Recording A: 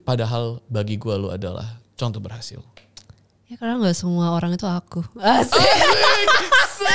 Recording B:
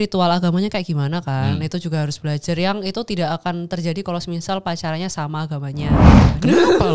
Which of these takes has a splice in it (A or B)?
B